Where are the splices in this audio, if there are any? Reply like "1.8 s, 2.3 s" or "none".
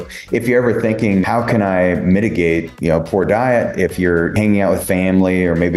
1.2 s, 2.7 s, 4.3 s